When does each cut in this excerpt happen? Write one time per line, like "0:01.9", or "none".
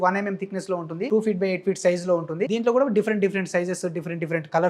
0:01.1
0:02.5